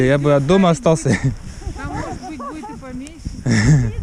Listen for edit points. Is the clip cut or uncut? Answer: uncut